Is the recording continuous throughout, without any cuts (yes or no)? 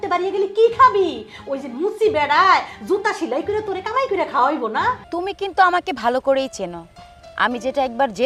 no